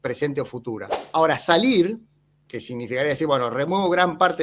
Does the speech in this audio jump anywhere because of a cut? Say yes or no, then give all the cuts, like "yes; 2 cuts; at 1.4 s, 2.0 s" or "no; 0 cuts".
yes; 1 cut; at 0.9 s